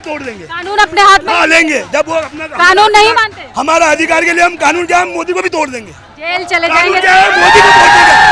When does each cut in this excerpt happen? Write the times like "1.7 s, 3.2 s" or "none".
none